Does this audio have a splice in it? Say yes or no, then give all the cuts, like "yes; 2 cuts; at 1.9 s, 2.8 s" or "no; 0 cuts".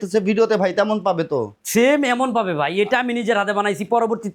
no; 0 cuts